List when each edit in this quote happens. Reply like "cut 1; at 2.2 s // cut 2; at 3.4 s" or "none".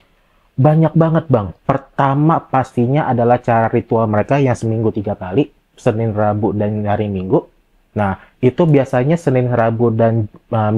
none